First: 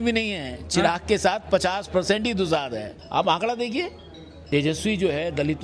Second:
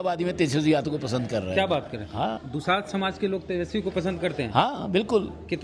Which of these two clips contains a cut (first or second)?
first